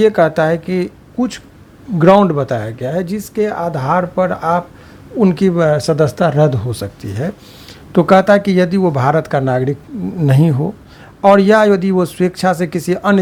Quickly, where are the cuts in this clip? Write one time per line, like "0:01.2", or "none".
none